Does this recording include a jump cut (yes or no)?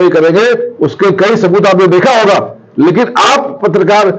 no